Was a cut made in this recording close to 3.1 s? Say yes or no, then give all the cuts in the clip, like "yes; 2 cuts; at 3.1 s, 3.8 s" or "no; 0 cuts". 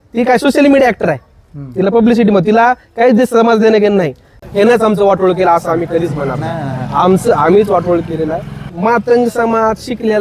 no; 2 cuts; at 4.3 s, 8.7 s